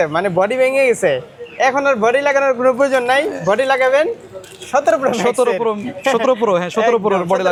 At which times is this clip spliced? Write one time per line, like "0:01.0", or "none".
none